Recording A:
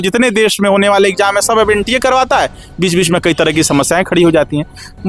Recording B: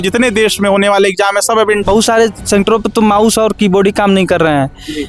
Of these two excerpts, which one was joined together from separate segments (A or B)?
B